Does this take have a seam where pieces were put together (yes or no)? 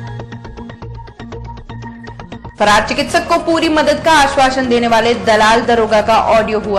yes